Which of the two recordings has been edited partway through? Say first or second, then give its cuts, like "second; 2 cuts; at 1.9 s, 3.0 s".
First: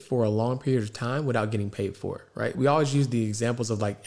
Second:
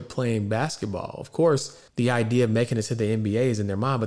second; 1 cut; at 1.8 s